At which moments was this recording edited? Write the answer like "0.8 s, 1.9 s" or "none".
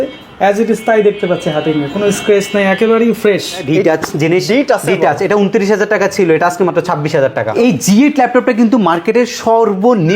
3.6 s, 7.5 s